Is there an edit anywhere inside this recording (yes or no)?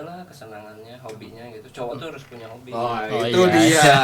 no